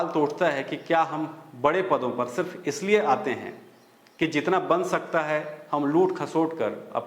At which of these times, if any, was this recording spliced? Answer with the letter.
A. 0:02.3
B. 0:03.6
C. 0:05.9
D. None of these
D